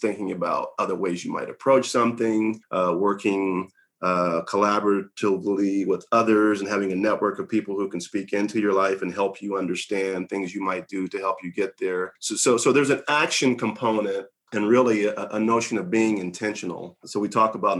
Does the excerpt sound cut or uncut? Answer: uncut